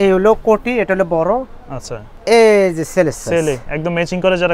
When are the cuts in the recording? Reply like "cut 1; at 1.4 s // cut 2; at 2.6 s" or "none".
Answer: cut 1; at 2.2 s